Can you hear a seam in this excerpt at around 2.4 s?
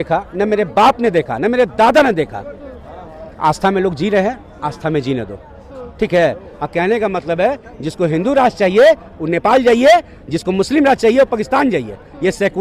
no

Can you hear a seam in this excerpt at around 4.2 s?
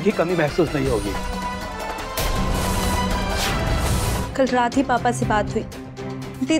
yes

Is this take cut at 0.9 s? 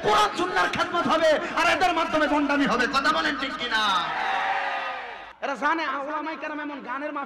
no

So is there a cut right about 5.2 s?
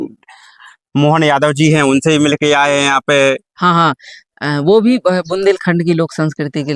no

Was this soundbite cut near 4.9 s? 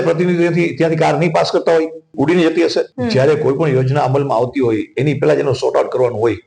no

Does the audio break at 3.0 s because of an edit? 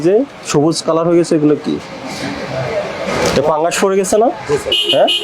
yes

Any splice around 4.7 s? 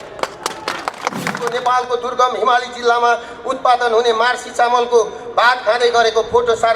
no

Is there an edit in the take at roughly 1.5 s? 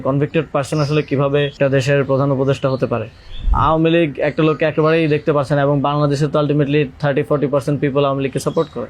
yes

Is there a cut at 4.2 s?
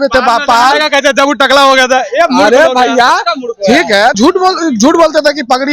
yes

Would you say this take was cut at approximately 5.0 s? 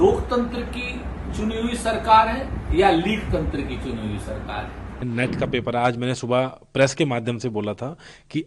yes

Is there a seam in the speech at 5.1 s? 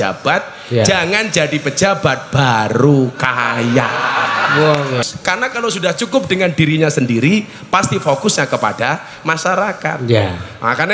yes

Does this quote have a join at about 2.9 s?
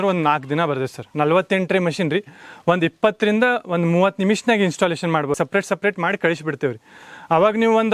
no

